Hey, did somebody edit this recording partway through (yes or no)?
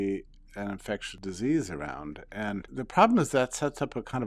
yes